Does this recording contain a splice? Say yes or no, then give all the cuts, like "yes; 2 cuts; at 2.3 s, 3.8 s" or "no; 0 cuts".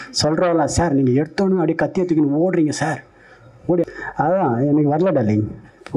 yes; 1 cut; at 3.8 s